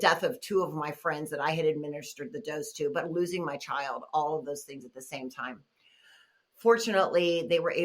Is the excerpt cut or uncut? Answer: uncut